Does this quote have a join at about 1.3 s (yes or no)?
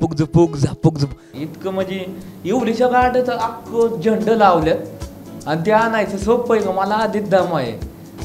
yes